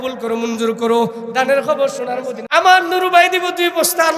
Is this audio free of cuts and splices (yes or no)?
no